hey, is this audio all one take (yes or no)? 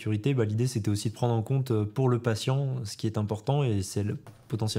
yes